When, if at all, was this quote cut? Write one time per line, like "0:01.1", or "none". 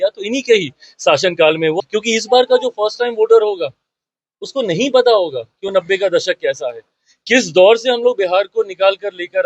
0:01.8